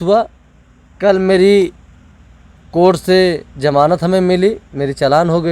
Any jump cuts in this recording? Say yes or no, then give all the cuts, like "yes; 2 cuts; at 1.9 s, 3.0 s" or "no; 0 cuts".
no; 0 cuts